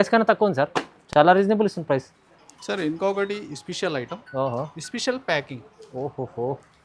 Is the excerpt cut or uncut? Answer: uncut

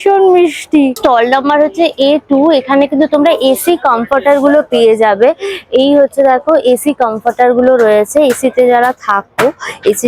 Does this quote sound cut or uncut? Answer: uncut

